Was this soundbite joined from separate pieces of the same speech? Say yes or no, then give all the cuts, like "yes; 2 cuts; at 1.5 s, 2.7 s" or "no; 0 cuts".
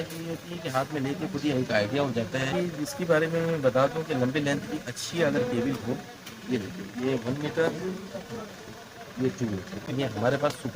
yes; 2 cuts; at 2.4 s, 9.9 s